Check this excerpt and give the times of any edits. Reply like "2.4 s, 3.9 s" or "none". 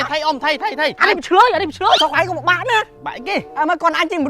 1.0 s, 2.0 s